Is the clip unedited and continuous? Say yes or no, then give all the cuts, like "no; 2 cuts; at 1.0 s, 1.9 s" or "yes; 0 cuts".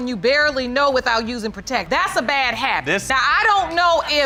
yes; 0 cuts